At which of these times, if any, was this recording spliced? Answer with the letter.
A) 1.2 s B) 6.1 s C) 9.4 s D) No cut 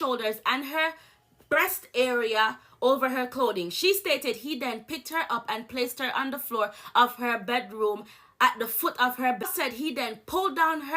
C